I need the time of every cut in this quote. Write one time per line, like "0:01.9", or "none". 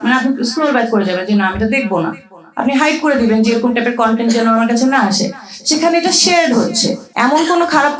0:07.0